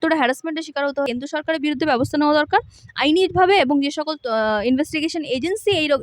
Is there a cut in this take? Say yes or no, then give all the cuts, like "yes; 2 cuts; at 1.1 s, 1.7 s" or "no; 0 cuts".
yes; 1 cut; at 1.1 s